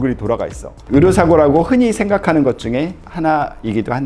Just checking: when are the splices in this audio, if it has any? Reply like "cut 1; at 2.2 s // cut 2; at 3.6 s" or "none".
none